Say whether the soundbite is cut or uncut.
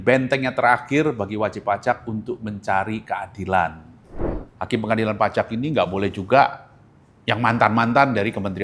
cut